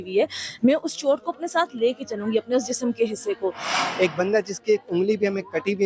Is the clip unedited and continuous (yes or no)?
no